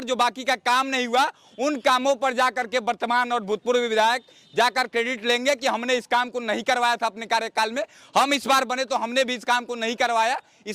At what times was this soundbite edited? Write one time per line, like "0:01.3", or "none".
none